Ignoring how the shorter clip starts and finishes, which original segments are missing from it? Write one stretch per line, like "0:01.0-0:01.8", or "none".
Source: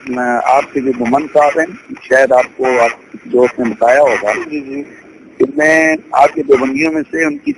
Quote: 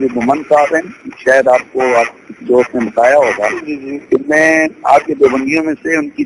0:04.8-0:05.2